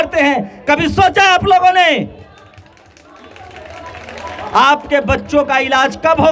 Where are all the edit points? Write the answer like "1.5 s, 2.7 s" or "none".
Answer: none